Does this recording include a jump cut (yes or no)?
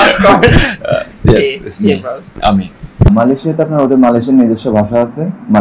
no